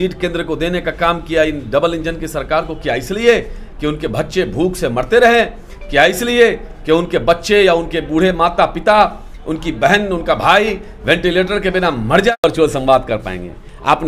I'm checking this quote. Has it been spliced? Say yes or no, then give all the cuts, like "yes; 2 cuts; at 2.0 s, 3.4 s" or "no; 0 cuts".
yes; 1 cut; at 12.4 s